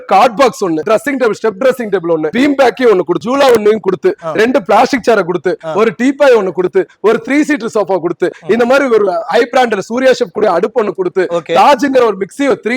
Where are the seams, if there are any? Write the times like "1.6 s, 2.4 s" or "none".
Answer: 0.8 s, 2.3 s, 3.2 s